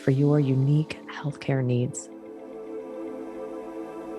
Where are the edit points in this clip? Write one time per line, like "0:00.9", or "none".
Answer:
0:02.0